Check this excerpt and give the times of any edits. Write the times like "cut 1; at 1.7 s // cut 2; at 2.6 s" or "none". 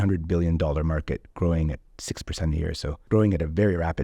cut 1; at 3.0 s